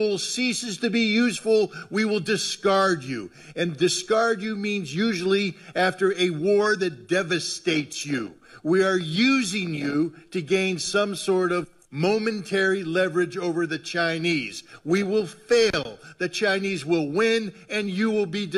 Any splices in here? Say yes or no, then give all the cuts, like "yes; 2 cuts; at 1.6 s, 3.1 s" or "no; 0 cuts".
no; 0 cuts